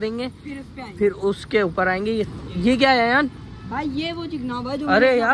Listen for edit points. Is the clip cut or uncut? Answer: cut